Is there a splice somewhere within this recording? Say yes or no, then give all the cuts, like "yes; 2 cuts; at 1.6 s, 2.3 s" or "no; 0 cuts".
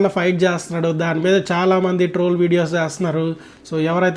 no; 0 cuts